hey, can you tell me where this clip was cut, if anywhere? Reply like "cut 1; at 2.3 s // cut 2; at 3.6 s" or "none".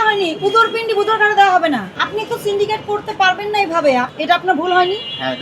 cut 1; at 2.0 s // cut 2; at 4.1 s